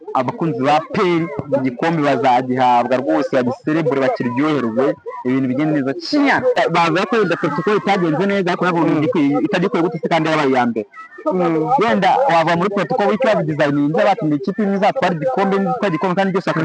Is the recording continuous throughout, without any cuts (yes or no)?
no